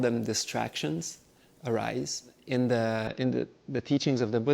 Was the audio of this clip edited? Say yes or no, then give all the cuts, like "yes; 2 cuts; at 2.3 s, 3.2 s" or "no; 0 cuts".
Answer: yes; 1 cut; at 2.4 s